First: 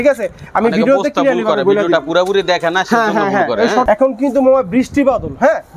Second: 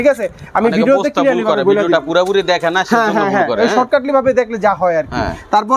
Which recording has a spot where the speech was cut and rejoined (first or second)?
first